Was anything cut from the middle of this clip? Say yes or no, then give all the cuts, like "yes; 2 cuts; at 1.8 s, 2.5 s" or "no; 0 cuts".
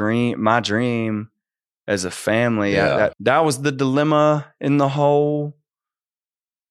yes; 1 cut; at 3.2 s